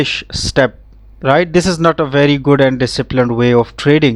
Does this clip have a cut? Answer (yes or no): no